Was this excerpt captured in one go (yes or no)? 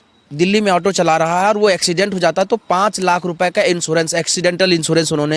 yes